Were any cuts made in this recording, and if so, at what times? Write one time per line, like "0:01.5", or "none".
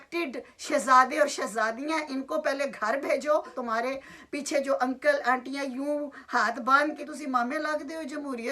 0:03.5
0:07.0